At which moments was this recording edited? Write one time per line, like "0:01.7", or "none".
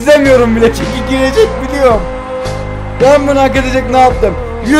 none